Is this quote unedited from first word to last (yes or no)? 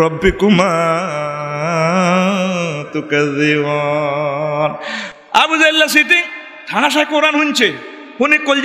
no